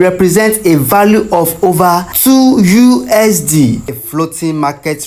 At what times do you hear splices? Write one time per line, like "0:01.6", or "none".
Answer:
0:02.1
0:03.9